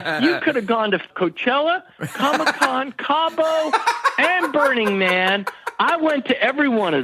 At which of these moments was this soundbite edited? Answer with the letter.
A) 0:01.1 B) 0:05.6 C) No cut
A